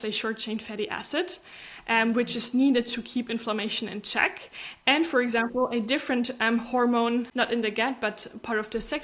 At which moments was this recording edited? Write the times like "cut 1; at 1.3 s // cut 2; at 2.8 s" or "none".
cut 1; at 7.3 s